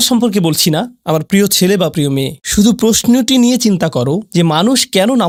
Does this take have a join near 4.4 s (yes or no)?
no